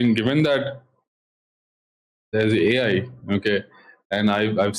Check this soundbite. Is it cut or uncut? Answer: uncut